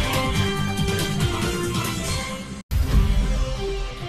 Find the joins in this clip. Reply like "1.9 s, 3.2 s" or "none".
2.2 s